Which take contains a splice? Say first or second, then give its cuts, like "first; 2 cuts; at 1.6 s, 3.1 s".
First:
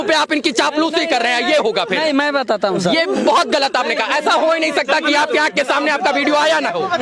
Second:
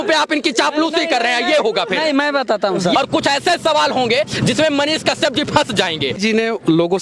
second; 2 cuts; at 3.0 s, 6.2 s